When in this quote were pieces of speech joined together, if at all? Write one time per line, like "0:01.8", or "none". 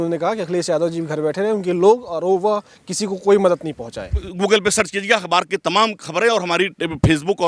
0:04.2